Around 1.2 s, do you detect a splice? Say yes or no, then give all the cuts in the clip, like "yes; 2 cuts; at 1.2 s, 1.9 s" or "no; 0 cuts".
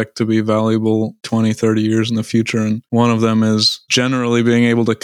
yes; 3 cuts; at 1.2 s, 2.8 s, 3.8 s